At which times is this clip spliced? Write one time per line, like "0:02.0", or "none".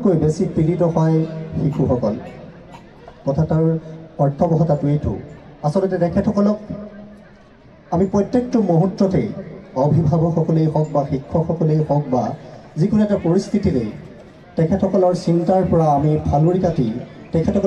none

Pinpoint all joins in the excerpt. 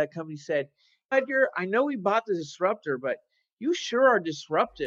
none

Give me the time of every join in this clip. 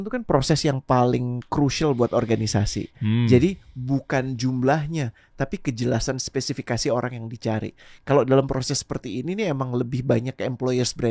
none

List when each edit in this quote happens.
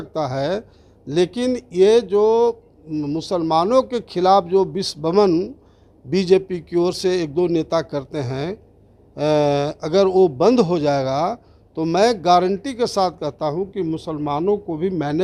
none

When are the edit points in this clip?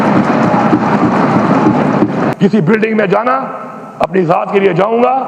0:02.3

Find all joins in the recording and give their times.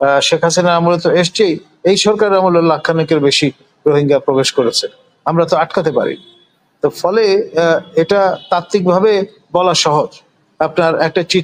none

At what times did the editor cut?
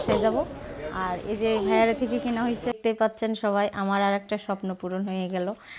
0:02.8

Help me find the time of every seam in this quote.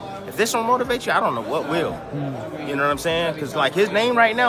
none

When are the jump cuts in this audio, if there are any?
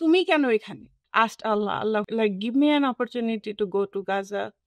0:01.0
0:02.1

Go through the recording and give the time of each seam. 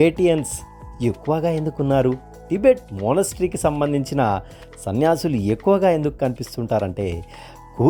none

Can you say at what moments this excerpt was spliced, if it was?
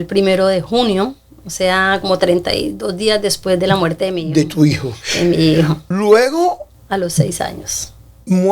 0:05.8
0:06.7

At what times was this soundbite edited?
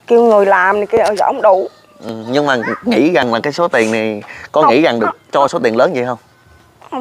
none

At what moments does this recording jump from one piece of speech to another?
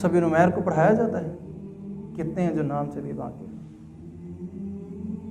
none

